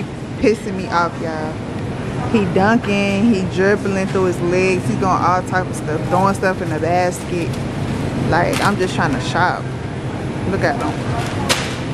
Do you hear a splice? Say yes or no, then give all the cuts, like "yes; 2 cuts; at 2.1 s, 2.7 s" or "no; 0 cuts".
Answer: no; 0 cuts